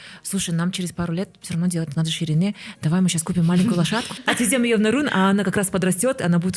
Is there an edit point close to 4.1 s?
yes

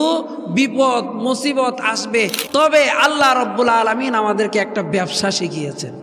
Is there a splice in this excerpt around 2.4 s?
yes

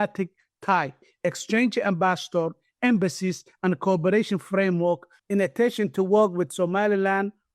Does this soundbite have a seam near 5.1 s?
yes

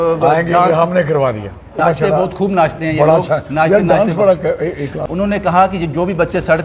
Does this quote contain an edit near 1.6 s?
yes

